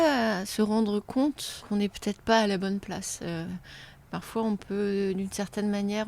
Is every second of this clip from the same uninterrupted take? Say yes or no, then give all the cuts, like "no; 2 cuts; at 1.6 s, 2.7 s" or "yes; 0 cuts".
no; 1 cut; at 1.6 s